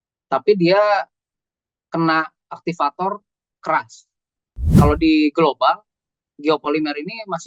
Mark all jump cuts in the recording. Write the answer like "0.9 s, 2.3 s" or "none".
4.7 s